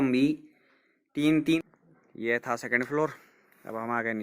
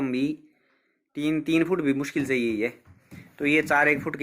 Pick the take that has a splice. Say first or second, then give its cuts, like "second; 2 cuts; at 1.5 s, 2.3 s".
first; 1 cut; at 1.6 s